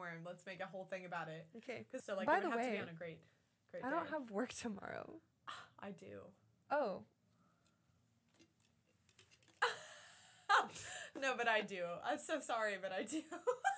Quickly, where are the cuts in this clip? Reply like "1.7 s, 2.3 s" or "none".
2.0 s

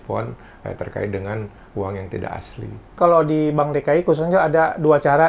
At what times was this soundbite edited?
3.0 s

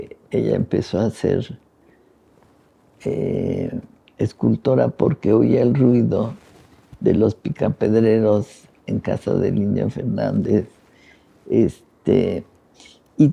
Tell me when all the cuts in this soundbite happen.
none

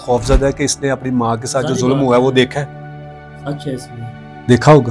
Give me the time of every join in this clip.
none

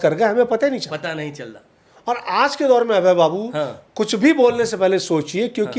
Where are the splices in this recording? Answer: none

